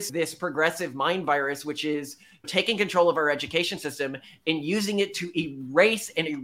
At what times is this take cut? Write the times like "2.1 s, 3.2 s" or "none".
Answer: none